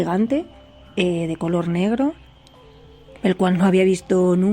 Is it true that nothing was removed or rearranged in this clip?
yes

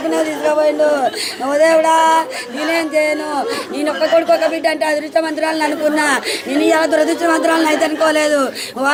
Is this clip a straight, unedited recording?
yes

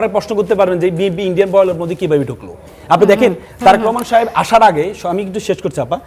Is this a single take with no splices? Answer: yes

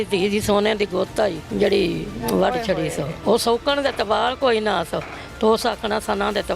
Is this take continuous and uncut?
no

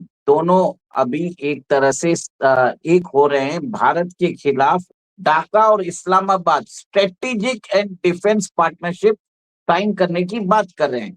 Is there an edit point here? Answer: yes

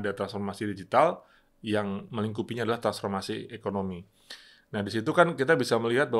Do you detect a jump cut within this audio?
no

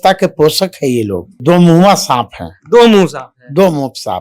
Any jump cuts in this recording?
yes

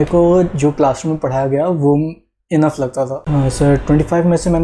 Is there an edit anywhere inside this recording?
yes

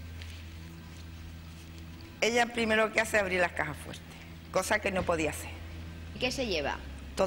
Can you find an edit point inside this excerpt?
yes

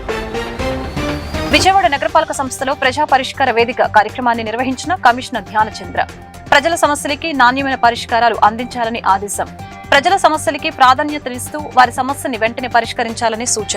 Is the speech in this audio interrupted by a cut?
no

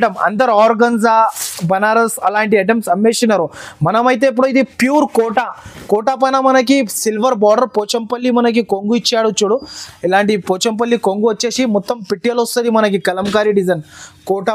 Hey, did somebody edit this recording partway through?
no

